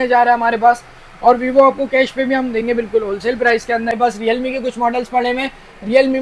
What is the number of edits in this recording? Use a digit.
1